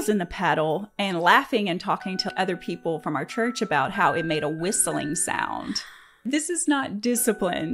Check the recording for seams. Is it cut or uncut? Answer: cut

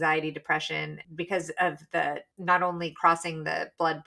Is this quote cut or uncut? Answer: cut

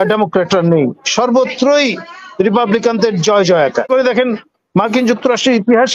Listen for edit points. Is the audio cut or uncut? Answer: cut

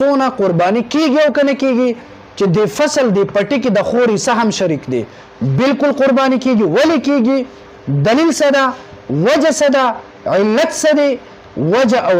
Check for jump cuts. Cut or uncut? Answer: uncut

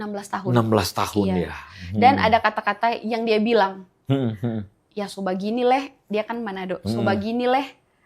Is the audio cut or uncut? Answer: uncut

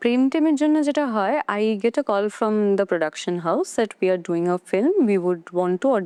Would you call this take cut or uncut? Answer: uncut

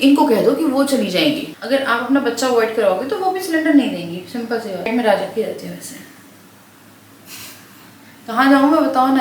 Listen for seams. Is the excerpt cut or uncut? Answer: cut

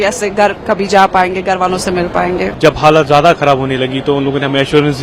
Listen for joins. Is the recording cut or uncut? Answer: cut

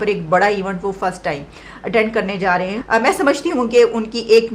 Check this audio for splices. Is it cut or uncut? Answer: cut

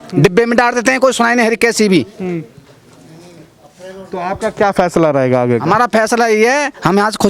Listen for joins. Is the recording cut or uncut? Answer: uncut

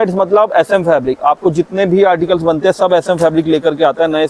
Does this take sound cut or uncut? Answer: uncut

